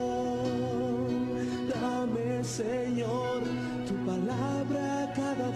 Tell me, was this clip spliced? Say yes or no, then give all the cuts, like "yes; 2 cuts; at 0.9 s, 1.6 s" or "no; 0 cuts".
no; 0 cuts